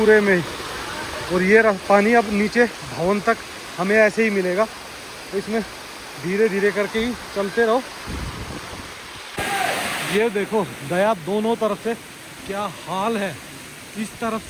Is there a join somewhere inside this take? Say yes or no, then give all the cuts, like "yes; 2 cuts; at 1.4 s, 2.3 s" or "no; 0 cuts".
yes; 1 cut; at 9.2 s